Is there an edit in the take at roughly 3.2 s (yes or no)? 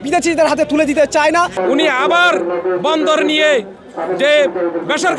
no